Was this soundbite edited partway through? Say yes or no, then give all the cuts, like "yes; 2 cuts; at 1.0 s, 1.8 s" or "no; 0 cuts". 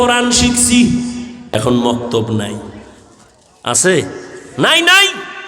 yes; 1 cut; at 1.4 s